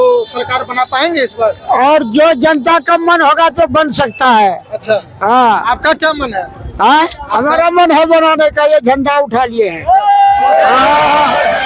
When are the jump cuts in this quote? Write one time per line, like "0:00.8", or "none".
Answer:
none